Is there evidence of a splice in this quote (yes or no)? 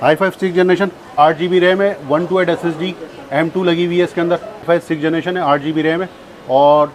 yes